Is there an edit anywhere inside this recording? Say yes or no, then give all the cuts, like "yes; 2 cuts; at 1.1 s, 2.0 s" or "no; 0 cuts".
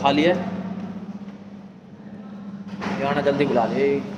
no; 0 cuts